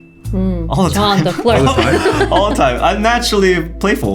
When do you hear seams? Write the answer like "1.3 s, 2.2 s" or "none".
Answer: none